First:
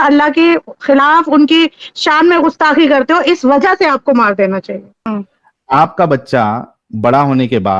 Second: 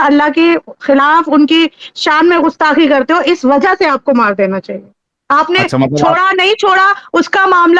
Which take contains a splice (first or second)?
first